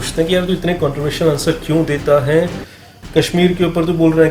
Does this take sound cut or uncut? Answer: uncut